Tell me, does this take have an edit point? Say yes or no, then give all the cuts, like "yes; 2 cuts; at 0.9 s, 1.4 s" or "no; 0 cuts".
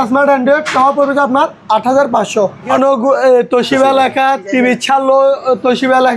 yes; 1 cut; at 2.8 s